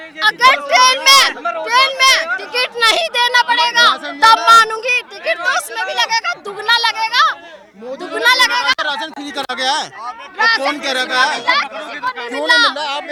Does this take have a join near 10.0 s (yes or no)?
no